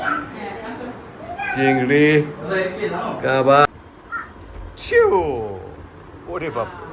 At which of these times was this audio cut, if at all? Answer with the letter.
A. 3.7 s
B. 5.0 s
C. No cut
A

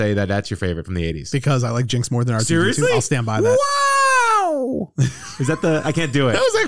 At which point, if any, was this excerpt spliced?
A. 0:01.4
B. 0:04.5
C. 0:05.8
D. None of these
D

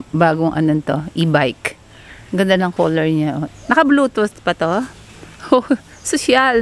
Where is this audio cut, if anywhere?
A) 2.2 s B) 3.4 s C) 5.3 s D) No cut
B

